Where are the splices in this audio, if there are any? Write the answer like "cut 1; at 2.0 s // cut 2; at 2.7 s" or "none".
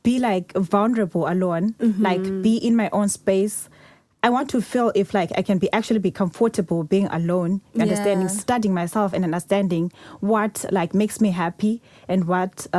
none